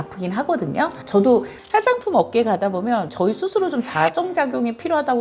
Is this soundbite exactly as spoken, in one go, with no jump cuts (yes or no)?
no